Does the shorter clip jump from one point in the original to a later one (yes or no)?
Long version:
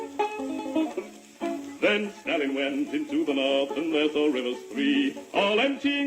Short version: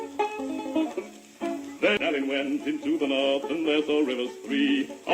yes